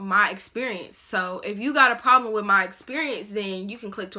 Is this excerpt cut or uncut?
uncut